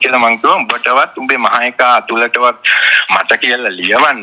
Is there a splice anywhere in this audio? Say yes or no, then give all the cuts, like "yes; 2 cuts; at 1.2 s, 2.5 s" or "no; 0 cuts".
no; 0 cuts